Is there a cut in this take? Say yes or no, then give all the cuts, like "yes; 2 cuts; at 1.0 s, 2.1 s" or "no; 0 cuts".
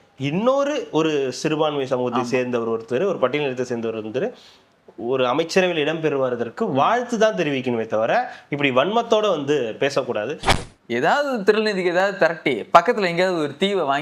yes; 1 cut; at 10.5 s